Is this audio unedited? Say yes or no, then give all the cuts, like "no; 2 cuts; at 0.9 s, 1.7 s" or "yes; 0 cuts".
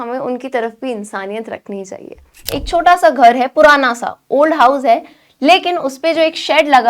no; 1 cut; at 2.4 s